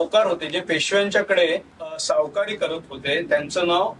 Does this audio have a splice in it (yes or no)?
yes